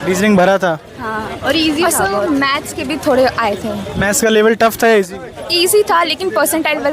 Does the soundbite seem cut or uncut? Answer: uncut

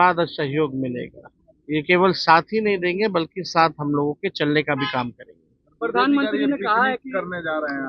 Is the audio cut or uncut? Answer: uncut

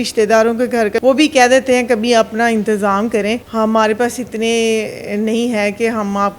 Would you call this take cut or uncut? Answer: cut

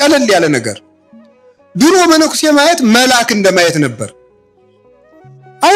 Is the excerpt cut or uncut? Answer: uncut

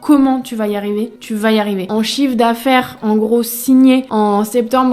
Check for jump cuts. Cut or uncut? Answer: cut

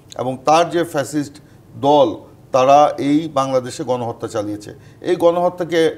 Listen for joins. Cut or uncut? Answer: cut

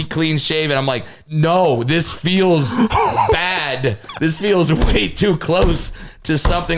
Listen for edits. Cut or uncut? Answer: cut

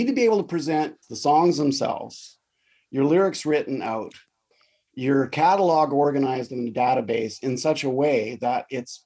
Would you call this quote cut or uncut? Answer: cut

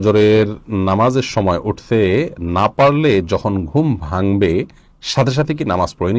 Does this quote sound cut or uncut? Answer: uncut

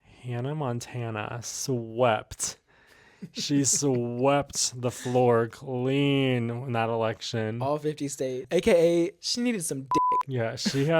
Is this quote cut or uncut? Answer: cut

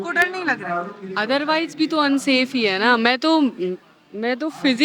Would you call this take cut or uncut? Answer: uncut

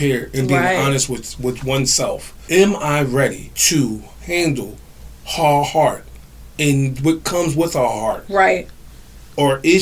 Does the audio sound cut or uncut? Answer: cut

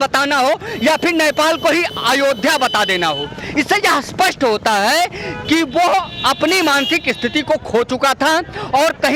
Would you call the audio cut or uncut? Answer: uncut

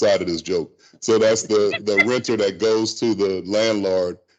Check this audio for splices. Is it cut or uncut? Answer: uncut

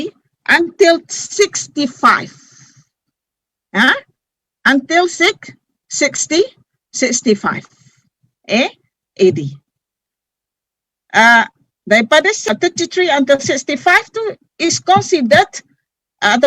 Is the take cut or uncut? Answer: cut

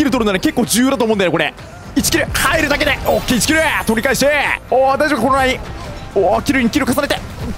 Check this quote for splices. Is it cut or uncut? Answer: cut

